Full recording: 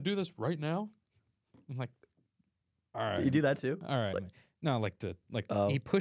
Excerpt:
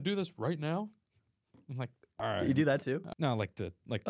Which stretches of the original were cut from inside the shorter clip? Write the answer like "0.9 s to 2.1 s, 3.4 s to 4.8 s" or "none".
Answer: 2.0 s to 2.8 s, 3.8 s to 4.5 s